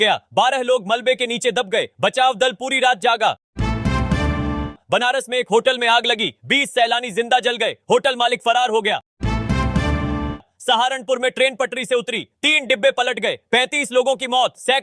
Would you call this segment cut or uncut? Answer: cut